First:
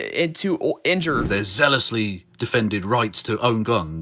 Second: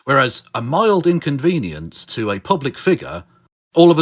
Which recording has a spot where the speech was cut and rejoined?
first; 1 cut; at 1.2 s

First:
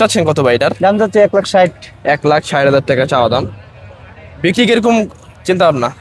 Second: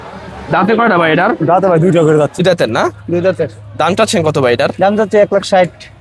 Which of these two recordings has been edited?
second; 1 cut; at 2.4 s

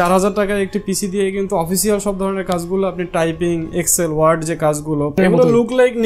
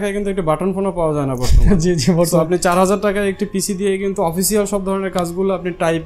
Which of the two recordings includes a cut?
first; 1 cut; at 5.2 s

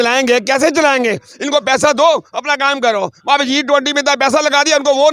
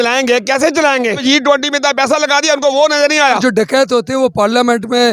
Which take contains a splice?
second; 2 cuts; at 1.2 s, 3.4 s

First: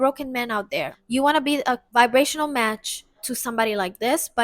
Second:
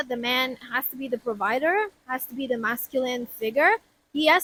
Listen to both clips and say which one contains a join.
first; 3 cuts; at 1.0 s, 1.8 s, 3.3 s

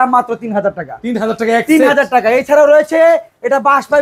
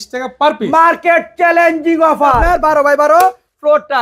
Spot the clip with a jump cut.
second; 1 cut; at 2.4 s

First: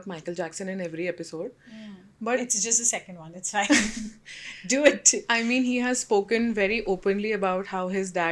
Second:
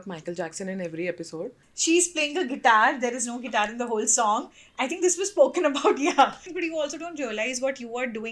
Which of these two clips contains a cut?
second; 2 cuts; at 1.7 s, 6.4 s

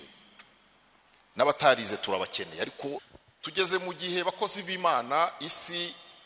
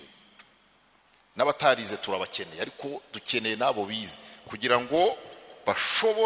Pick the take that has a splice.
first; 1 cut; at 3.1 s

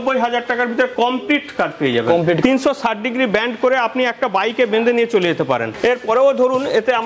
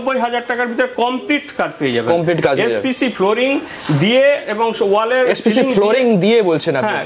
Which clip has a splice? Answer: first; 2 cuts; at 2.4 s, 5.7 s

